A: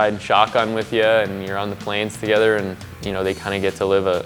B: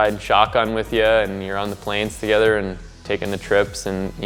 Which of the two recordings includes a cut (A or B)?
A